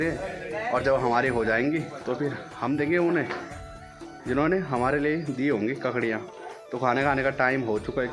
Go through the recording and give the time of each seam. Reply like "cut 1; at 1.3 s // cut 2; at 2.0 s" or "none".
none